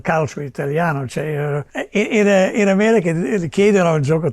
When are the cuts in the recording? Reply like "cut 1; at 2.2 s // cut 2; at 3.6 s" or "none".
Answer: cut 1; at 1.7 s